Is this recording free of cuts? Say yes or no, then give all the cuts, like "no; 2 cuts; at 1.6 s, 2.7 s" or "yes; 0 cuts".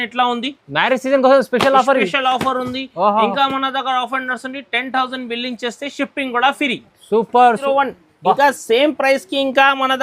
no; 1 cut; at 7.6 s